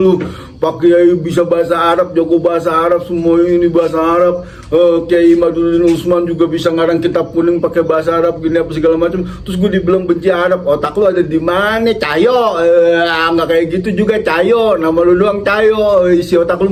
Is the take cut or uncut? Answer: uncut